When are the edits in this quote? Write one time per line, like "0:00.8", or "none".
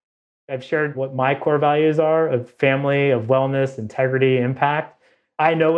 0:01.0